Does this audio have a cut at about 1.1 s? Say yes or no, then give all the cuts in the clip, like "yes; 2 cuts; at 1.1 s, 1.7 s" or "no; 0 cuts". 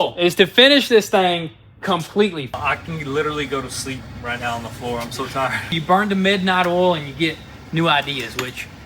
no; 2 cuts; at 2.5 s, 5.7 s